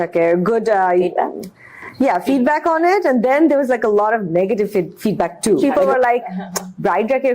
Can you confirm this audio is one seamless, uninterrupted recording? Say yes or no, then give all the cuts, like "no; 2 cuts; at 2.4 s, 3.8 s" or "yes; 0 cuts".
no; 1 cut; at 5.6 s